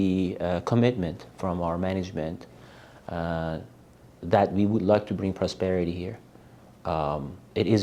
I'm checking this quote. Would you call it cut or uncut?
uncut